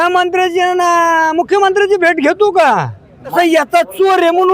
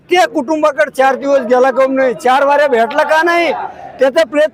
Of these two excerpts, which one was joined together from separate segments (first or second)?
first